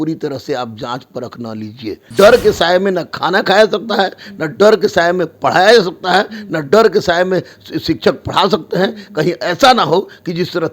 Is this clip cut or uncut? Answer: cut